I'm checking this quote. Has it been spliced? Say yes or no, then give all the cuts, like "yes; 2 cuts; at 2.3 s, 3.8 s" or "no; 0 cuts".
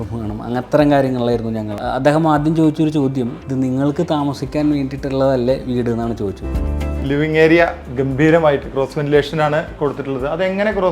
yes; 2 cuts; at 1.7 s, 6.5 s